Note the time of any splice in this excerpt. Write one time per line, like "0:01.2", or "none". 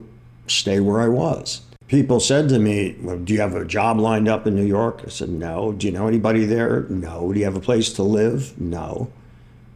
0:01.7